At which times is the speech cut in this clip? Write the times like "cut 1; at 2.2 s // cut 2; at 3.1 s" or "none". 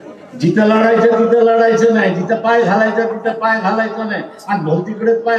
none